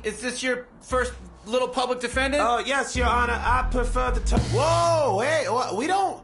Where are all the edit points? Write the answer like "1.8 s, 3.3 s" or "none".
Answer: 4.3 s